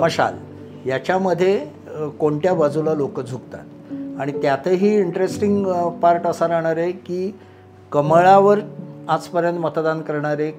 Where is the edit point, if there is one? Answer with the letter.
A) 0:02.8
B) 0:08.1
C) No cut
C